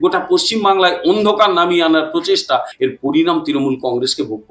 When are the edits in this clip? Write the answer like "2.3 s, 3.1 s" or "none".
2.7 s